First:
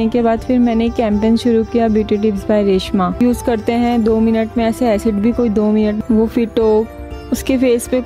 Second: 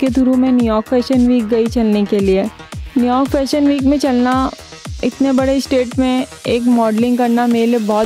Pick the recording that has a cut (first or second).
first